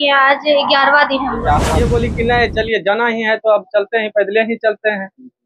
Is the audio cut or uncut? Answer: cut